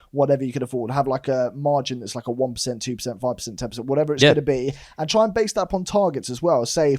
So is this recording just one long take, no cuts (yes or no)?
yes